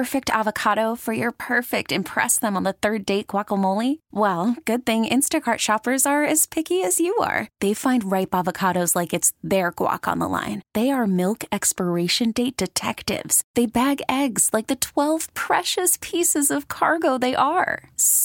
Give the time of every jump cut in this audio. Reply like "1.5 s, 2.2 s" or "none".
none